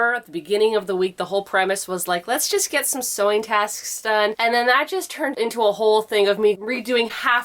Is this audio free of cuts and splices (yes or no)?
no